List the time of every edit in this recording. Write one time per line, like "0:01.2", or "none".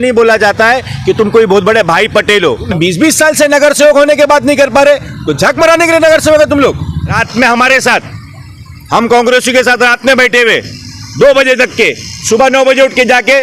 0:02.7
0:07.2